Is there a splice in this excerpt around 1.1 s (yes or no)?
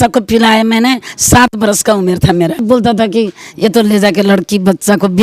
no